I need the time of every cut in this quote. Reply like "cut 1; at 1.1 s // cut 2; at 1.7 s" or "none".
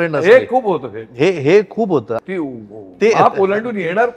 cut 1; at 2.2 s